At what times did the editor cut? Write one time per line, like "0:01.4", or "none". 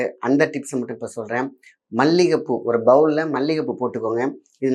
none